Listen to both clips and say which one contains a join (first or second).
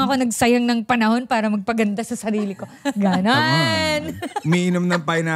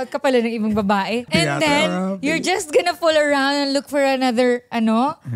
second